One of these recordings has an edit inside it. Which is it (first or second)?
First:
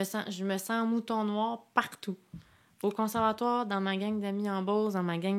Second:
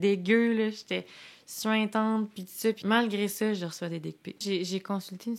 second